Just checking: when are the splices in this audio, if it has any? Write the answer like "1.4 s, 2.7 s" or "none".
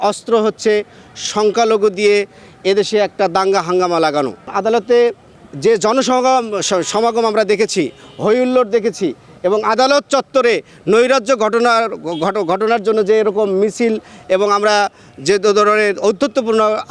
none